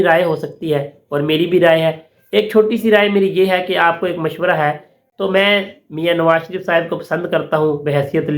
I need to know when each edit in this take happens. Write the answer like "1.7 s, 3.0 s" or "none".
5.0 s

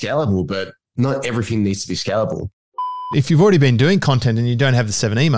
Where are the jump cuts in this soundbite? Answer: 0.9 s, 2.6 s

